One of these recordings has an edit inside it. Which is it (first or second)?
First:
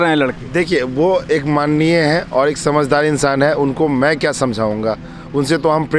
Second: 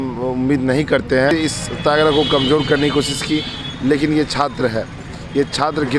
second